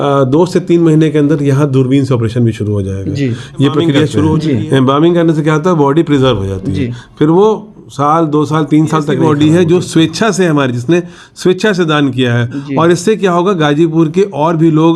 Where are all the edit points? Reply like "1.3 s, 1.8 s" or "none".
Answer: 4.4 s, 9.2 s